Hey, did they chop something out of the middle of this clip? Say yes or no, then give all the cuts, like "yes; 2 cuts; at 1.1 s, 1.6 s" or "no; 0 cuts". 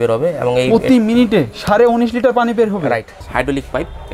yes; 1 cut; at 3.2 s